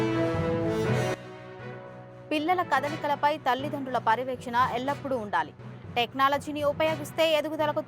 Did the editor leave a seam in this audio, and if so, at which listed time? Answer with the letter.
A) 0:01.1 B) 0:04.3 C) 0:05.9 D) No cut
A